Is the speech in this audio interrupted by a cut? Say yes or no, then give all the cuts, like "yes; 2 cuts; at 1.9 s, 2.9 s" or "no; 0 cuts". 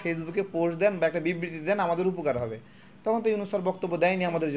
no; 0 cuts